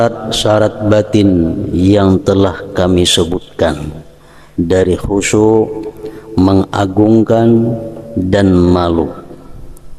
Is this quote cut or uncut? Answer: uncut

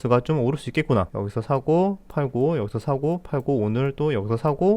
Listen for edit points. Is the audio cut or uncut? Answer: cut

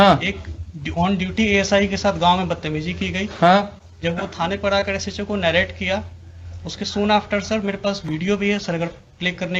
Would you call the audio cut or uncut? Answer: uncut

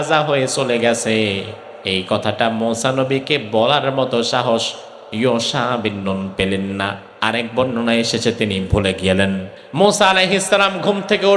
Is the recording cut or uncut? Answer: cut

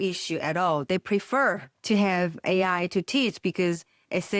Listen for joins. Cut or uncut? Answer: cut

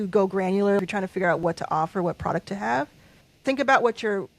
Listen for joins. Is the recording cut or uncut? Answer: cut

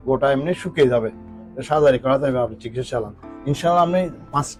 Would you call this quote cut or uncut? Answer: uncut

